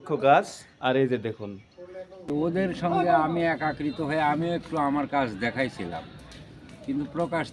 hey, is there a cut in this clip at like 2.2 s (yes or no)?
yes